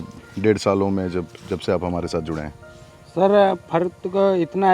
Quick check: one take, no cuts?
yes; 0 cuts

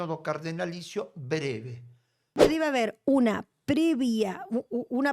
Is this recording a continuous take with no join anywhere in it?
no; 1 cut; at 2.4 s

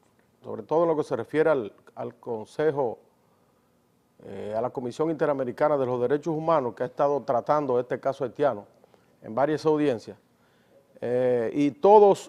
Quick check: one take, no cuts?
no; 1 cut; at 1.9 s

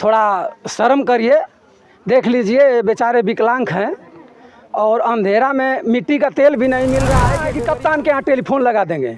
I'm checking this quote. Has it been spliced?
yes; 1 cut; at 7.4 s

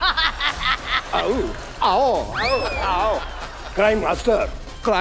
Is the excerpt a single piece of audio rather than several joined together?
yes; 0 cuts

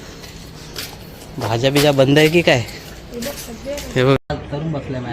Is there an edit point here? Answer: yes; 1 cut; at 4.2 s

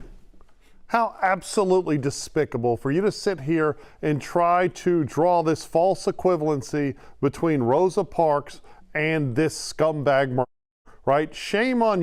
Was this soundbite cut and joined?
no; 0 cuts

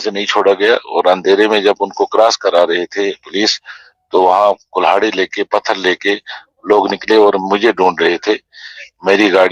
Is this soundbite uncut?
yes; 0 cuts

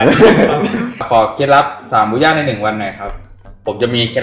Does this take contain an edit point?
yes; 1 cut; at 1.0 s

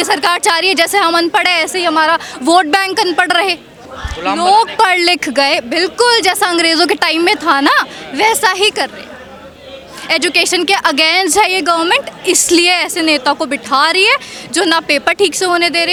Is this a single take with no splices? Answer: yes; 0 cuts

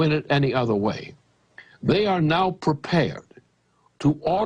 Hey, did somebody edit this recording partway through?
yes; 1 cut; at 2.8 s

